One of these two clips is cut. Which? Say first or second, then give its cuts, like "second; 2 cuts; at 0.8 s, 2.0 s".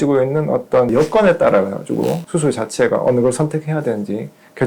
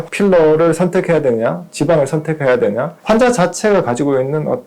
second; 1 cut; at 3.0 s